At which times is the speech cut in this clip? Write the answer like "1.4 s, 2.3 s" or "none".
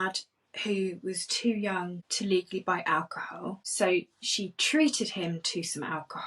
2.0 s, 3.6 s